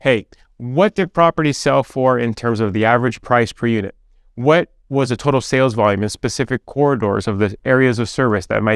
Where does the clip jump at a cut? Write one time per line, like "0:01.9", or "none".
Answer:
none